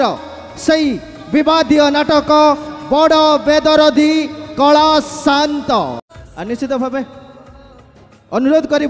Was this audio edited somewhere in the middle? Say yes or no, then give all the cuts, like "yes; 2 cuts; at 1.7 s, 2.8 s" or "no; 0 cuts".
yes; 1 cut; at 6.0 s